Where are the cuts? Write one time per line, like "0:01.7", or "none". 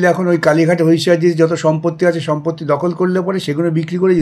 none